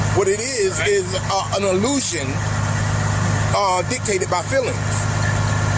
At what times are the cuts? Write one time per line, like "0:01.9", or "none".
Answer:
none